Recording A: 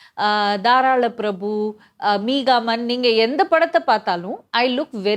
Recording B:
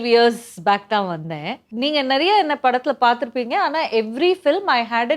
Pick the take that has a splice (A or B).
B